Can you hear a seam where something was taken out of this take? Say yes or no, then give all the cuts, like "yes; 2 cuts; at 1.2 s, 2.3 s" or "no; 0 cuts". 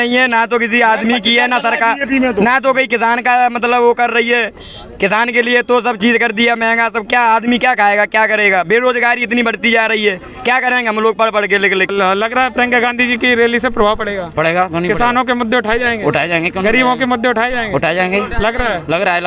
yes; 1 cut; at 11.9 s